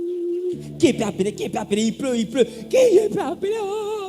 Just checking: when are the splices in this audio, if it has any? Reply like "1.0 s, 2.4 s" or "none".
none